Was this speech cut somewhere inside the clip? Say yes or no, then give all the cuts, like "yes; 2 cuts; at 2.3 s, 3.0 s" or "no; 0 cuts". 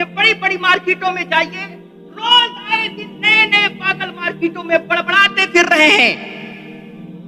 yes; 1 cut; at 6.2 s